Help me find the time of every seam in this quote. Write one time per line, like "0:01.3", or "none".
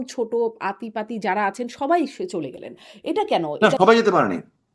0:03.6